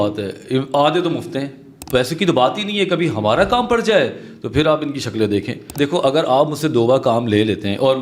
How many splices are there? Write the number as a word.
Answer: two